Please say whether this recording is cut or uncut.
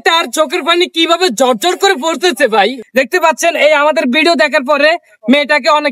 cut